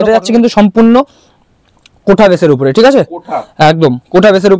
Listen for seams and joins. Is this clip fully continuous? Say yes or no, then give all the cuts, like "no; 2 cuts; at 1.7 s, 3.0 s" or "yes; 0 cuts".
yes; 0 cuts